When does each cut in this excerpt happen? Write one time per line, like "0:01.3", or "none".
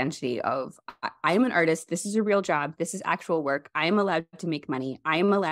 none